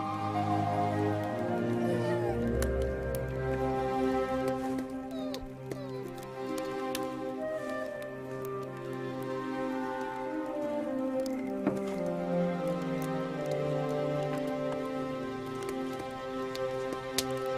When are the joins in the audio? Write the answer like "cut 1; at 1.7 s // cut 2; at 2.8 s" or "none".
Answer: cut 1; at 5.6 s